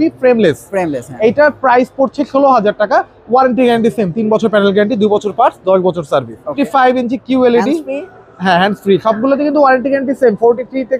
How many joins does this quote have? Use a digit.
1